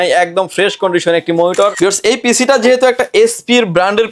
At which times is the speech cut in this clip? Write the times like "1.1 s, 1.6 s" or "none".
1.7 s